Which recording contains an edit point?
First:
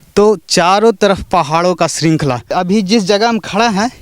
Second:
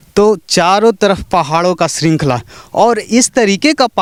first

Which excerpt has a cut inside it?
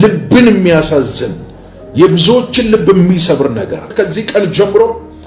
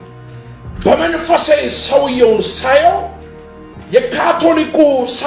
first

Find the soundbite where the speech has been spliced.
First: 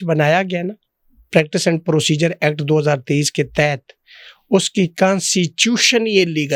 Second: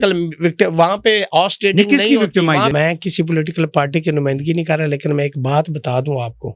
second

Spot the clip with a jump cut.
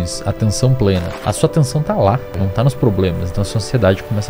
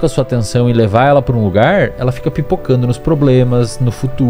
first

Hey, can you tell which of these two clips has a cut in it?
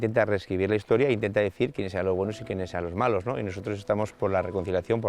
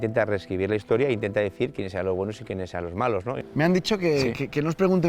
second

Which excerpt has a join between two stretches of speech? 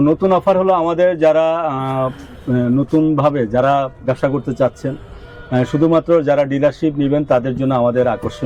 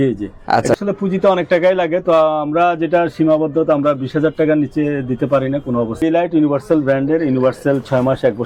second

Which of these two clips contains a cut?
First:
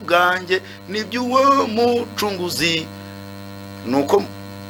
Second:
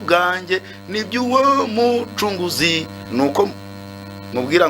second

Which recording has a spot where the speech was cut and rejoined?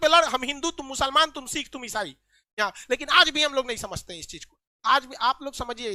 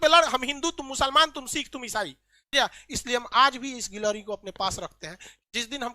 second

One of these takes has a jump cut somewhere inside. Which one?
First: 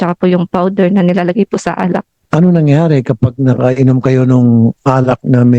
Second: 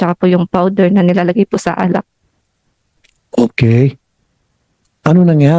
first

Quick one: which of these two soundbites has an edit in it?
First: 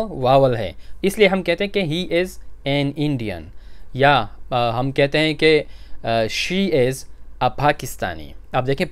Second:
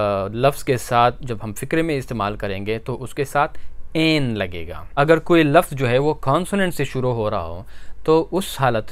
second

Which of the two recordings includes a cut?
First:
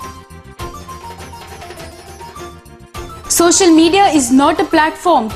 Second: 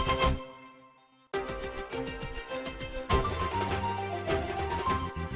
first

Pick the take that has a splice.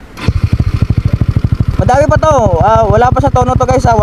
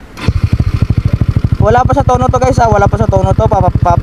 second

